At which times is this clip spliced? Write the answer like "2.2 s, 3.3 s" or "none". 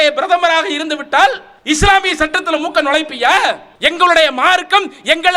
1.5 s, 3.7 s